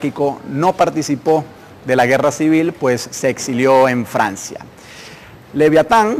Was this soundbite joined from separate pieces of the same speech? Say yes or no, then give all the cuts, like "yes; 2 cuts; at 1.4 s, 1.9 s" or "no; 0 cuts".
no; 0 cuts